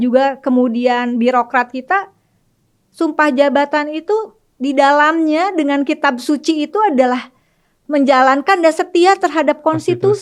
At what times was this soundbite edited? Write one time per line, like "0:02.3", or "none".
none

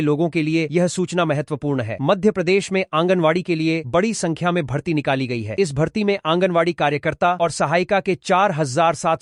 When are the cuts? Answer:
none

